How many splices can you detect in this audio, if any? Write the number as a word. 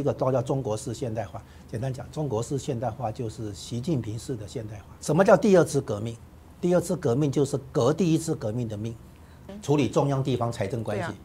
two